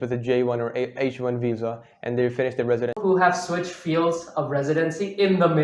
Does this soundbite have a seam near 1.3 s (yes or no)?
no